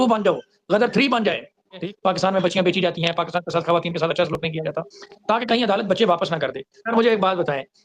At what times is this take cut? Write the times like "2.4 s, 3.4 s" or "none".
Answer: 1.8 s, 6.7 s

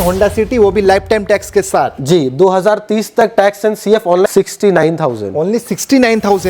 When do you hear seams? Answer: 4.2 s

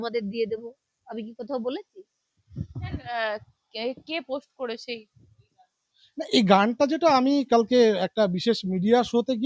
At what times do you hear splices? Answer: none

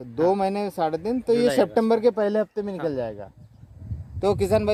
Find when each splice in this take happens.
none

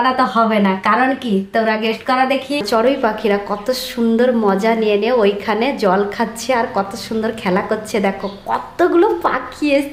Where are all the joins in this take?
2.6 s

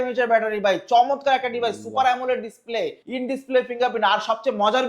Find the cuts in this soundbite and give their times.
3.0 s

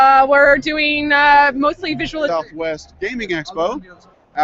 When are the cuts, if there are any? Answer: none

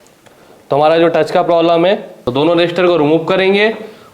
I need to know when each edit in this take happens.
2.2 s

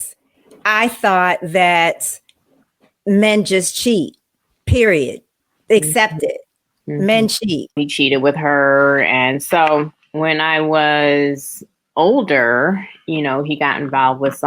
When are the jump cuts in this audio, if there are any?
7.7 s

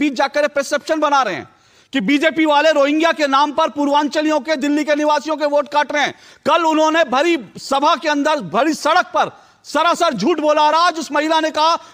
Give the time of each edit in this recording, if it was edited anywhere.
none

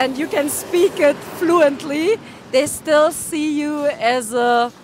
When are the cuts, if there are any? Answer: none

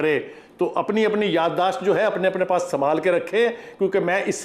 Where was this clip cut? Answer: none

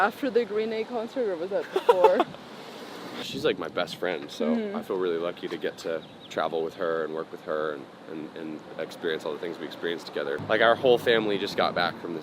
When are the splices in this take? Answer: 3.2 s, 10.4 s

